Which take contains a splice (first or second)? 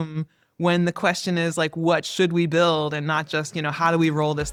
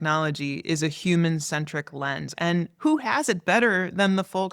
second